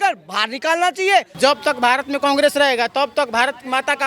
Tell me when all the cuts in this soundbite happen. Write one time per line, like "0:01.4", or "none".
0:01.3